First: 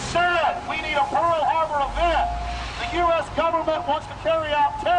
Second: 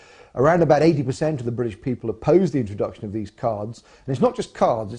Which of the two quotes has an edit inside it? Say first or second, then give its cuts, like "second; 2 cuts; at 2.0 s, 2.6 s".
first; 1 cut; at 2.9 s